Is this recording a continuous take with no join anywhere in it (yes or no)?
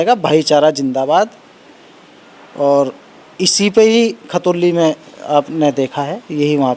yes